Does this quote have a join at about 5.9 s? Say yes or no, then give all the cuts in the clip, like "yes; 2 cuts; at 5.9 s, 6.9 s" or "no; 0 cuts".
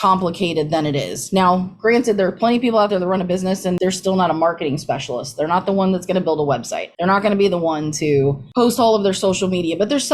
no; 1 cut; at 3.8 s